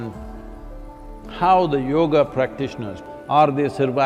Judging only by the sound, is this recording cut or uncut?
cut